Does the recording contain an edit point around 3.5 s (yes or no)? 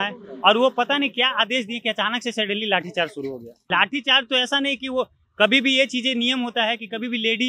yes